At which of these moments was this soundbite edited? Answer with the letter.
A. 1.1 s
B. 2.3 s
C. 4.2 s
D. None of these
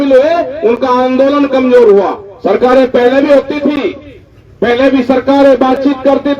B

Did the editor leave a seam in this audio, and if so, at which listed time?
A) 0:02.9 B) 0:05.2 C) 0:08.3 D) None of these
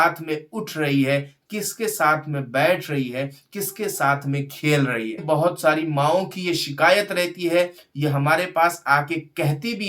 B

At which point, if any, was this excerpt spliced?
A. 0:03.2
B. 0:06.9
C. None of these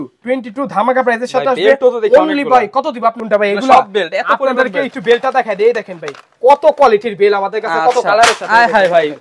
A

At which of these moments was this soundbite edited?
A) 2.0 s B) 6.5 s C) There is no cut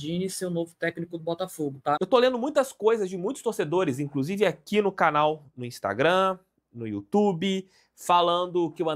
A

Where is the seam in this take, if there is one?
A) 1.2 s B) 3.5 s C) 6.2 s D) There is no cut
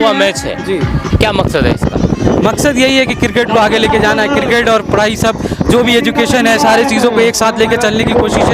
D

